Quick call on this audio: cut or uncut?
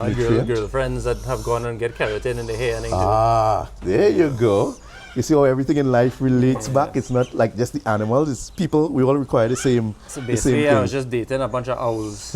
uncut